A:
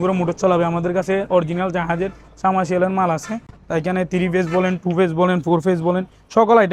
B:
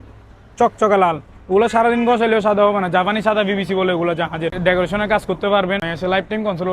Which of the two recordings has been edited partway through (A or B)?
B